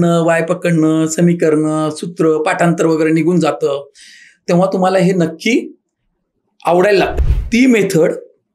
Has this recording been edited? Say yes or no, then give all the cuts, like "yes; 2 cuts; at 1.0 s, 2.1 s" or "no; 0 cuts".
yes; 1 cut; at 7.1 s